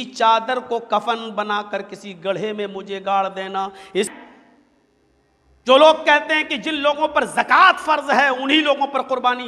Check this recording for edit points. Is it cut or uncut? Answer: cut